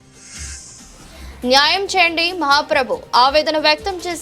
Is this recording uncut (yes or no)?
no